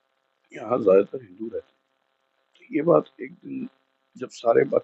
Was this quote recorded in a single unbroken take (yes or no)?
yes